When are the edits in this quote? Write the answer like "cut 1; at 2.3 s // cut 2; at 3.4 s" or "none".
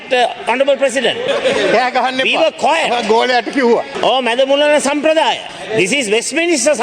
cut 1; at 1.2 s // cut 2; at 3.9 s // cut 3; at 5.5 s